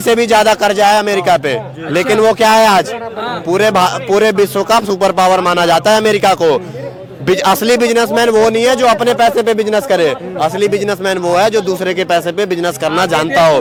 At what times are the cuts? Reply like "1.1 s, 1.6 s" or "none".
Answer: none